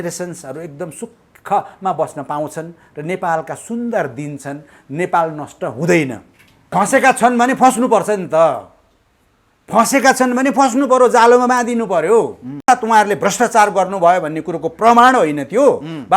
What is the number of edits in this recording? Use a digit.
2